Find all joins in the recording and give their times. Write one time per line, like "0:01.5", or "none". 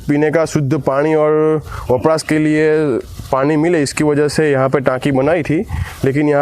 0:01.4